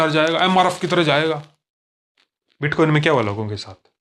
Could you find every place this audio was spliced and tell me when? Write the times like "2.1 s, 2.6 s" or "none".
none